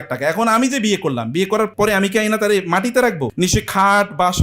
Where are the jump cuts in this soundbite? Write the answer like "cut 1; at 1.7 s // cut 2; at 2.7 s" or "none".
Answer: cut 1; at 1.7 s // cut 2; at 3.3 s